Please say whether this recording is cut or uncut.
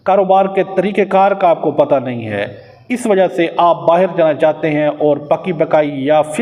uncut